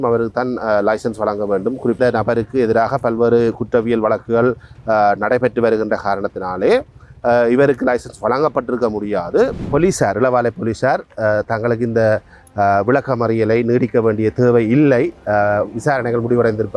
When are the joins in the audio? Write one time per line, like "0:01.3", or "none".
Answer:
0:02.0
0:09.6